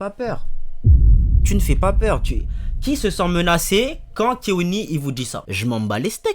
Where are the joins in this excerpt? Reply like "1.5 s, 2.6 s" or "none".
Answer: 5.4 s